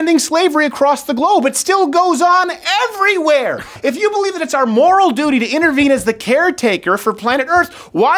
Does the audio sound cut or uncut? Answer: cut